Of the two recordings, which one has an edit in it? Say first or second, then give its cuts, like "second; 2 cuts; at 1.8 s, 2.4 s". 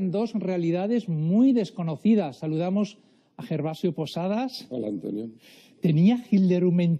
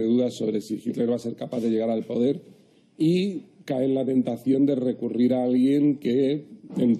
second; 1 cut; at 2.2 s